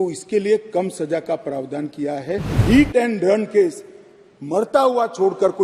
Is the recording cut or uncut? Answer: cut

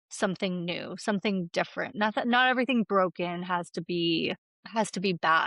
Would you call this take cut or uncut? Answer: cut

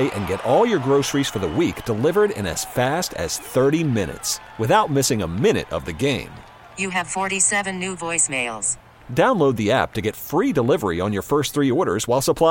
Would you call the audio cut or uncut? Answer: uncut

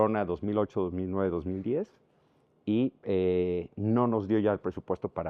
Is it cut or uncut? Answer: uncut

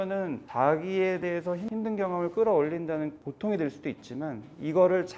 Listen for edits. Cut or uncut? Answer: cut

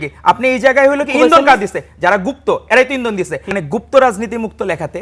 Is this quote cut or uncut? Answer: cut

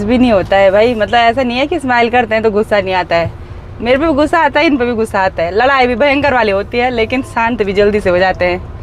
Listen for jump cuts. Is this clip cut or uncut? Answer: uncut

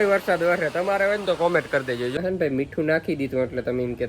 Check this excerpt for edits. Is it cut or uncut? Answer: cut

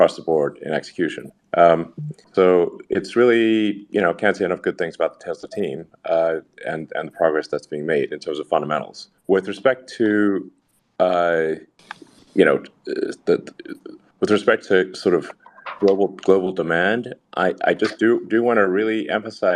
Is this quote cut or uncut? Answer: uncut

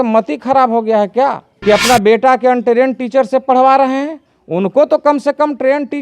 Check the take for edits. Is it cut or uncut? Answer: cut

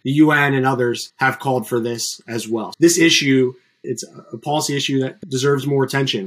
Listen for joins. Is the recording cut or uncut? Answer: cut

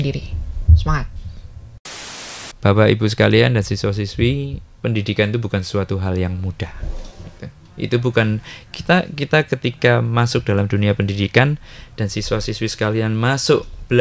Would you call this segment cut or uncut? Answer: cut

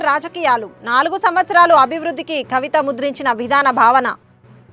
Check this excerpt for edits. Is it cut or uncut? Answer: uncut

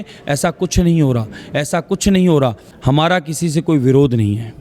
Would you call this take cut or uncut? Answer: cut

